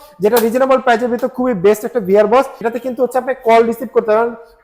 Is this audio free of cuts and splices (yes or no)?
no